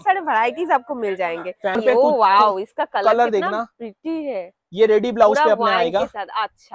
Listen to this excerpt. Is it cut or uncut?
cut